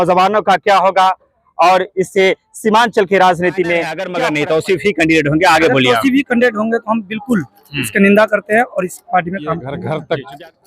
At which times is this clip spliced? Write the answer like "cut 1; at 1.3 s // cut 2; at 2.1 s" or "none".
cut 1; at 4.0 s // cut 2; at 9.7 s